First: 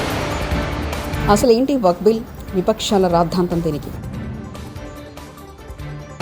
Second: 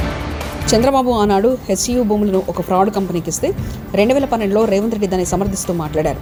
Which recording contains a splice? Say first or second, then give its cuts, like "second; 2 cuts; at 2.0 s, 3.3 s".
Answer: first; 1 cut; at 1.1 s